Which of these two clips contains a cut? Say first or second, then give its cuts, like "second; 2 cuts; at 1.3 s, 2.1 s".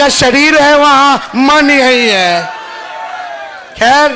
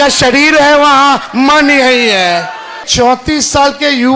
second; 1 cut; at 2.9 s